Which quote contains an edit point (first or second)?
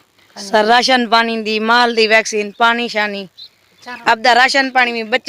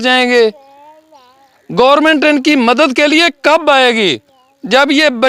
first